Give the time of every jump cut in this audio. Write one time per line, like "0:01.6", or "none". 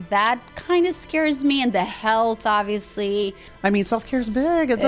0:03.4